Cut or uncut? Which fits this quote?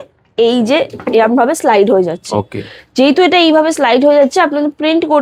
uncut